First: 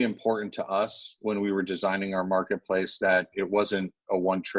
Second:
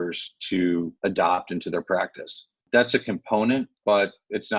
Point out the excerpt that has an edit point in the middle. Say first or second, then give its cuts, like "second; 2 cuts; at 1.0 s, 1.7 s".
second; 3 cuts; at 0.9 s, 2.6 s, 3.7 s